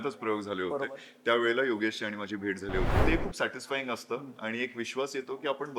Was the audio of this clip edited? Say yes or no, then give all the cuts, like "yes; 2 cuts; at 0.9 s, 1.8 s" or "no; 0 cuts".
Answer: yes; 1 cut; at 3.0 s